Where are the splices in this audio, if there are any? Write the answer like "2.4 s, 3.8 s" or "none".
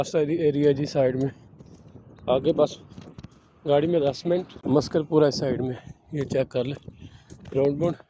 4.6 s